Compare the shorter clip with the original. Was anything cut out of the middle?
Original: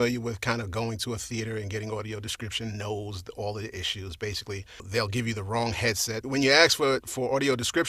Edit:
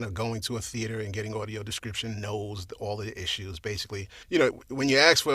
yes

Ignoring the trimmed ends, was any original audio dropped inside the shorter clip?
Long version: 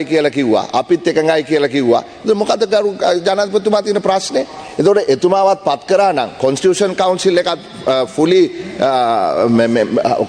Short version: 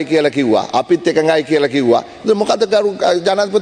no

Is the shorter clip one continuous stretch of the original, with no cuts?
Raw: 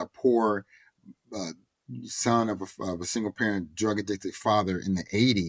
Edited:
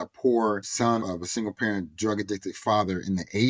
no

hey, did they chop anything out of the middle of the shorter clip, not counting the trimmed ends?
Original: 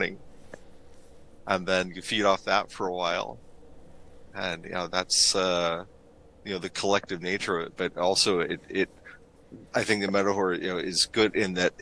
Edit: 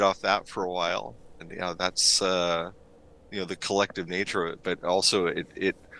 yes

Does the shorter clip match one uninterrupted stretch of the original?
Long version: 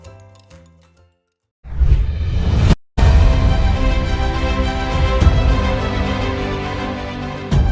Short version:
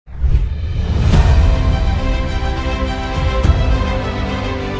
no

